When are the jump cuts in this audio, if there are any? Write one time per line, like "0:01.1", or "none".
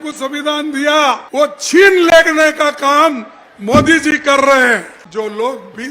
0:01.2
0:05.0